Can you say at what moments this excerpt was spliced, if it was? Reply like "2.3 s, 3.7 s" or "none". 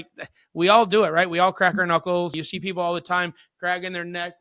2.4 s